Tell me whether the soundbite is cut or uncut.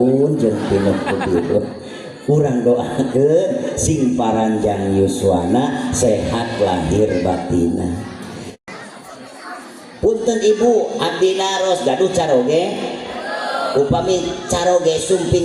cut